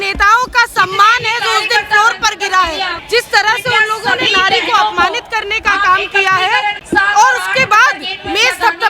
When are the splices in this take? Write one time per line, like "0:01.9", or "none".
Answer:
0:03.0
0:06.8